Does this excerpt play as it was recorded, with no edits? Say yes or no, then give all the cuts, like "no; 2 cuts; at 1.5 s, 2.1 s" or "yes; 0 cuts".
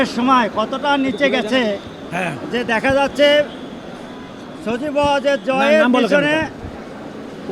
yes; 0 cuts